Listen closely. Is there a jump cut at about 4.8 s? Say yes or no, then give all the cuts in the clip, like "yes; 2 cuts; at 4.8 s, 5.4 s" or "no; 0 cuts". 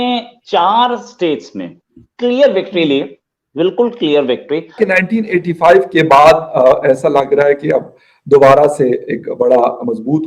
yes; 1 cut; at 4.8 s